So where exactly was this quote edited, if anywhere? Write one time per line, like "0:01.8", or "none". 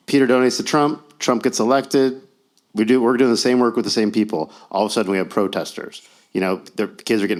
none